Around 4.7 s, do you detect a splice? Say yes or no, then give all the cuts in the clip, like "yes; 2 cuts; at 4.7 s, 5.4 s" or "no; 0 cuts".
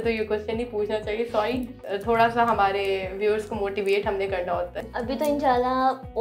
yes; 2 cuts; at 1.8 s, 4.7 s